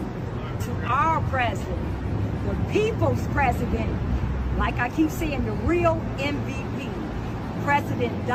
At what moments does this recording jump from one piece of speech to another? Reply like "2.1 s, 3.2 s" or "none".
none